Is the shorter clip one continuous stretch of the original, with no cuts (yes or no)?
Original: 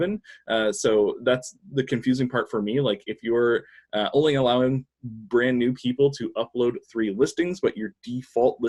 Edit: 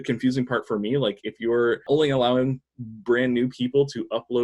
no